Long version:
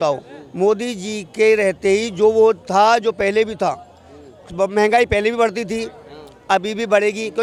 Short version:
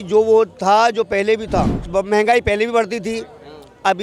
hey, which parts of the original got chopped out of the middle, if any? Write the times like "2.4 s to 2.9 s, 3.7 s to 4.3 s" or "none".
3.9 s to 4.4 s